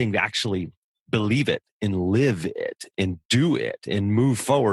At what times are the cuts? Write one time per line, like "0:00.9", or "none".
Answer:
none